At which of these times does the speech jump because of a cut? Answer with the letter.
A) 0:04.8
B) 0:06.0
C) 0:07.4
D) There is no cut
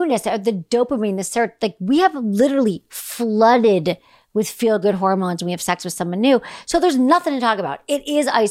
D